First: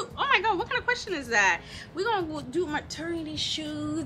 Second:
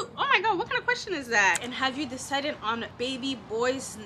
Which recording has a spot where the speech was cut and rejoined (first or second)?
second